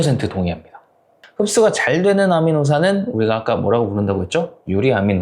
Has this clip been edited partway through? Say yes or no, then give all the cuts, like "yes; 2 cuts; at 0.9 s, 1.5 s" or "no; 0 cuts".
yes; 1 cut; at 1.2 s